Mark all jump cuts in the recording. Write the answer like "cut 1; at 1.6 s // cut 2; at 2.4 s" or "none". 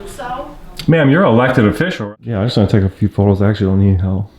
cut 1; at 1.9 s

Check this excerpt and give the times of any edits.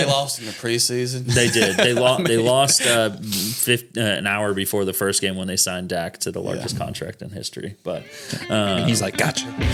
none

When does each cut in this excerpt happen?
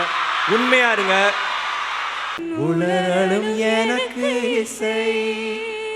cut 1; at 2.4 s

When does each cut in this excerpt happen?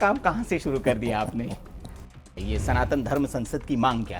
cut 1; at 2.4 s

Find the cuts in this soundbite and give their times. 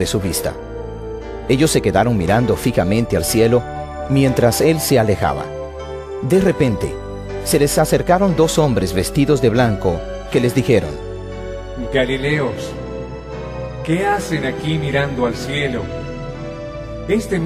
cut 1; at 4.4 s

